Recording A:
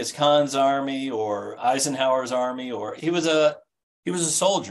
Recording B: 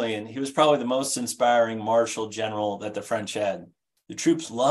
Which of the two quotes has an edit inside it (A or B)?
A